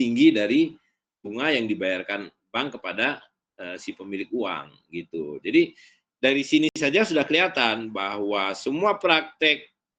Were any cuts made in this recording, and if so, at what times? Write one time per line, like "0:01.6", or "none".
0:06.8